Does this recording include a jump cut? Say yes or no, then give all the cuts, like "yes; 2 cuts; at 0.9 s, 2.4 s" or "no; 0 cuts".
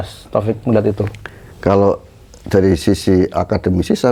no; 0 cuts